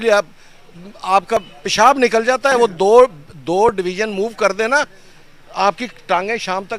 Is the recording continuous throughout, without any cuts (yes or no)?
yes